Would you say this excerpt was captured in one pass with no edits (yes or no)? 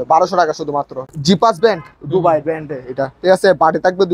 no